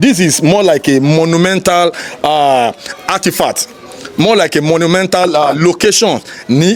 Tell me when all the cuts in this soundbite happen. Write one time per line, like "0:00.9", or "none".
none